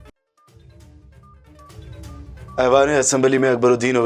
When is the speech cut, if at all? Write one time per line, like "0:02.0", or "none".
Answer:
0:02.0